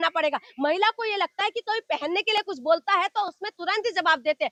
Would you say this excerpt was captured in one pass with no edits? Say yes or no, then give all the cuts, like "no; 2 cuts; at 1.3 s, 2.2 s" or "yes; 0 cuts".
yes; 0 cuts